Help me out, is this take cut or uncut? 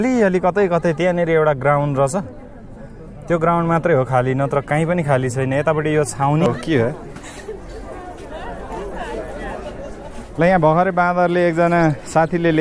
cut